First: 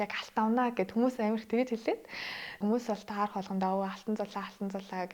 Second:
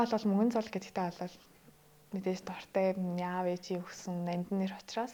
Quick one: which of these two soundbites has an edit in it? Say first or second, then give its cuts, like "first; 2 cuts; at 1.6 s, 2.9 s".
first; 1 cut; at 2.6 s